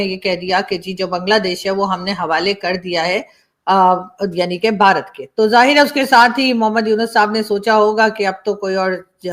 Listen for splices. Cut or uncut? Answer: uncut